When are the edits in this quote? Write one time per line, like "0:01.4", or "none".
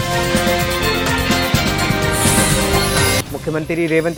none